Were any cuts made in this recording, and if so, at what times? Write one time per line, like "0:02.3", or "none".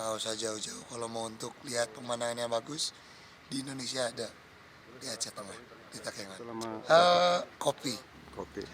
0:06.8